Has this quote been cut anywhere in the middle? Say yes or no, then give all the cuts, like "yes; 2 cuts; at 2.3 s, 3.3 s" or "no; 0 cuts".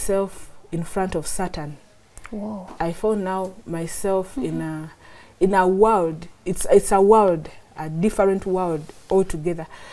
no; 0 cuts